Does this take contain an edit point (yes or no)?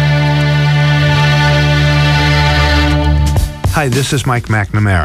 yes